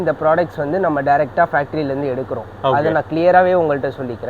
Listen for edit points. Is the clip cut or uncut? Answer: uncut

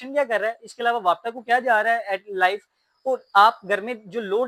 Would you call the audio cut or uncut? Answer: uncut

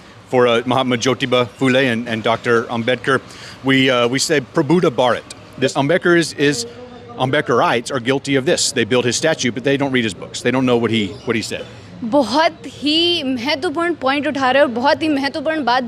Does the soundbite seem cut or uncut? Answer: cut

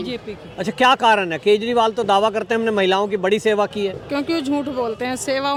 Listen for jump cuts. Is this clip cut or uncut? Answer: uncut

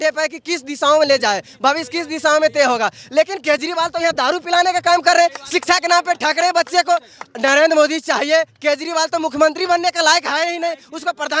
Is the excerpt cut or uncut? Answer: uncut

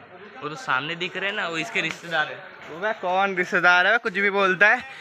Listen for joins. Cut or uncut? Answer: uncut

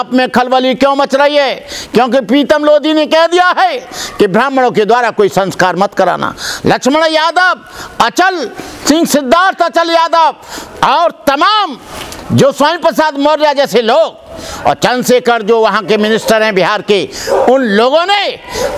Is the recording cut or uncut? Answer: uncut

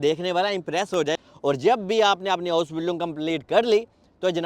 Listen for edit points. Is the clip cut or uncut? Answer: cut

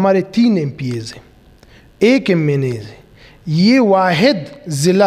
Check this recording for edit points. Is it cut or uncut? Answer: uncut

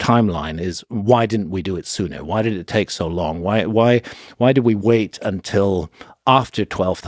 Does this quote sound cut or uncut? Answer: uncut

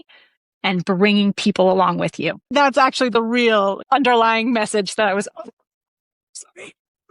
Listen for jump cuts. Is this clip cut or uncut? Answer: cut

